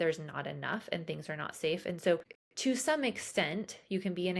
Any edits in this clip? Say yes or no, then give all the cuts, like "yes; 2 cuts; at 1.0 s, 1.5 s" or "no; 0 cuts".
yes; 1 cut; at 2.3 s